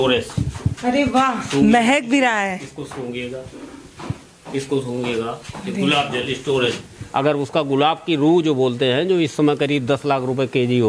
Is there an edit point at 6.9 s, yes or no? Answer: yes